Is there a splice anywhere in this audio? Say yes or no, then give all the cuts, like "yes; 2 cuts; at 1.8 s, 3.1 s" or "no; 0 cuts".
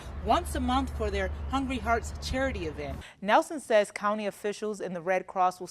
yes; 1 cut; at 3.1 s